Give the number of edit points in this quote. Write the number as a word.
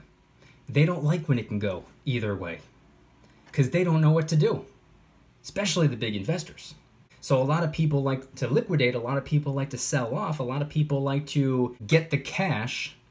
two